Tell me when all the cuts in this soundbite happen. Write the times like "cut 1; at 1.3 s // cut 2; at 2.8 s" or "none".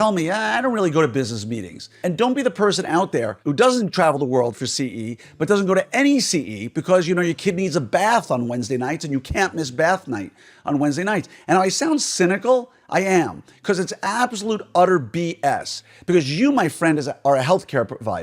cut 1; at 1.9 s // cut 2; at 3.4 s

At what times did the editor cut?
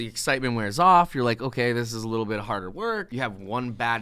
cut 1; at 3.1 s

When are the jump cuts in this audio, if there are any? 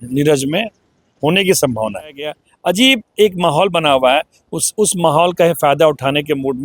cut 1; at 2.5 s

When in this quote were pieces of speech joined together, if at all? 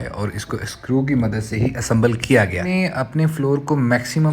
cut 1; at 2.7 s

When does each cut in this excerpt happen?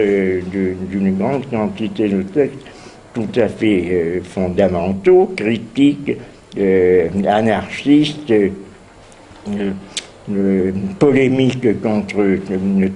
cut 1; at 4.3 s

